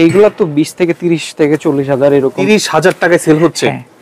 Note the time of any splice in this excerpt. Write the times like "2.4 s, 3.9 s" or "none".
2.4 s